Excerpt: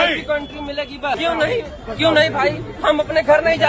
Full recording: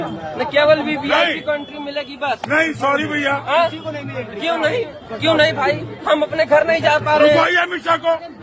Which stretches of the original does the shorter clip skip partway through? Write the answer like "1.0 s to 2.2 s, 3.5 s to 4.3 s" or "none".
2.4 s to 4.4 s